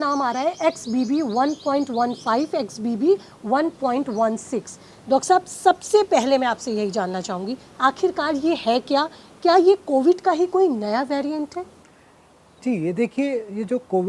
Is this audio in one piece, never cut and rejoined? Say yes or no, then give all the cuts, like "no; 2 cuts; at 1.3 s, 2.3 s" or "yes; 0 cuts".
yes; 0 cuts